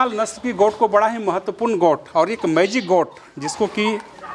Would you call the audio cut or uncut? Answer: uncut